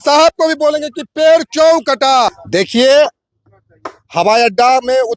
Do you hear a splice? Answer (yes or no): yes